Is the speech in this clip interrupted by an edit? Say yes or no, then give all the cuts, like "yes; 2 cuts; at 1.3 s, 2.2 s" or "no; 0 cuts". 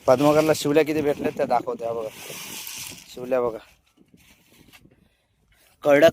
no; 0 cuts